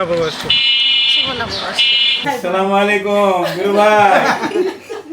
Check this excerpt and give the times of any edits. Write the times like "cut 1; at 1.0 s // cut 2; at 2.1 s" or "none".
cut 1; at 2.2 s